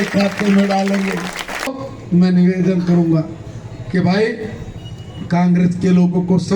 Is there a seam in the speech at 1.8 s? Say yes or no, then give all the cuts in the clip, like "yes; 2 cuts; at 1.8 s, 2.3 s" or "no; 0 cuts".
yes; 1 cut; at 1.8 s